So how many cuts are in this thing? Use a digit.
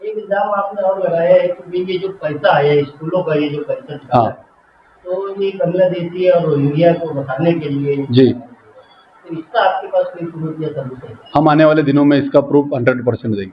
0